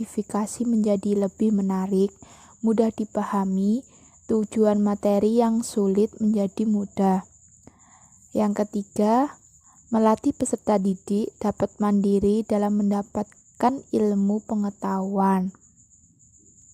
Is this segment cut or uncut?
uncut